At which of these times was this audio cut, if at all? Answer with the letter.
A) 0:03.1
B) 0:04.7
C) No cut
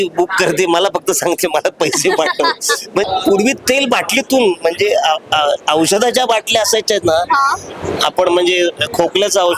A